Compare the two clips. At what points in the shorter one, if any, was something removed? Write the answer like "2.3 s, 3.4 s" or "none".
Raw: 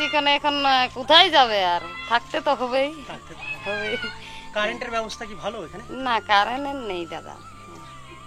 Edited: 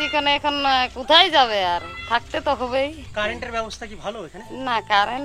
3.0 s